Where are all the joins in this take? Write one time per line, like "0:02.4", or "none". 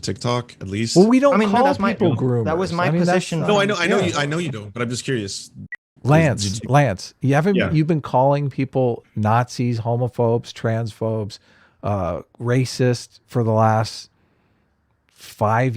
0:05.8